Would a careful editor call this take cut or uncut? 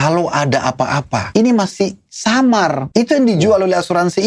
cut